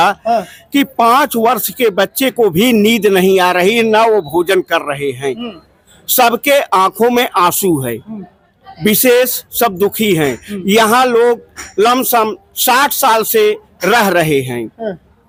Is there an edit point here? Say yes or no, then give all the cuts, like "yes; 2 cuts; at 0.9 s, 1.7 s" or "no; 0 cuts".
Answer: no; 0 cuts